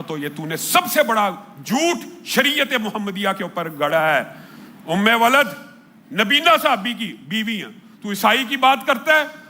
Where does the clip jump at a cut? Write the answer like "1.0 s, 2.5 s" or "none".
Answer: none